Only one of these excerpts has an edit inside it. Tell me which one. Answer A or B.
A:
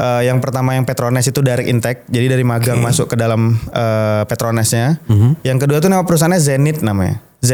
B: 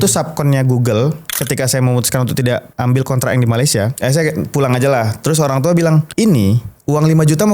B